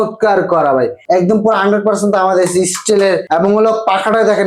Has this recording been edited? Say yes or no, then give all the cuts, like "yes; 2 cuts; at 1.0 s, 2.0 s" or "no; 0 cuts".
yes; 2 cuts; at 1.0 s, 3.2 s